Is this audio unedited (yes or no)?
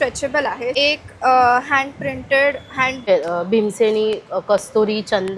no